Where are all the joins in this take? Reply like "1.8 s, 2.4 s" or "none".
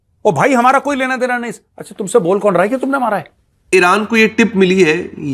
3.7 s